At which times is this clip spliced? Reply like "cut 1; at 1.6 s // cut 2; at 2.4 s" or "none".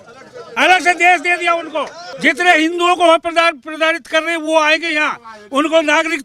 cut 1; at 2.0 s